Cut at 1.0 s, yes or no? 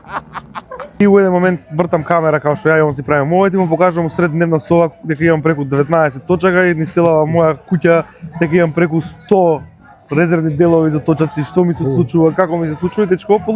yes